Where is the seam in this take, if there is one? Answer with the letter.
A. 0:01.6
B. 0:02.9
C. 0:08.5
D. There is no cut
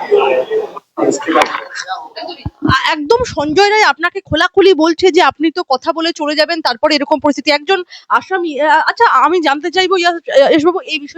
D